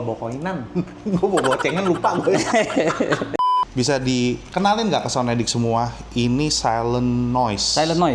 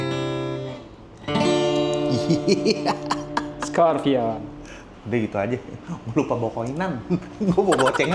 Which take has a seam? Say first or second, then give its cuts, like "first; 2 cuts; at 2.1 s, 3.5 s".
first; 1 cut; at 3.4 s